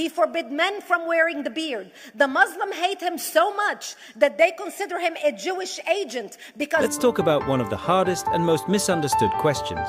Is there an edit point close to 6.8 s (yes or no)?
yes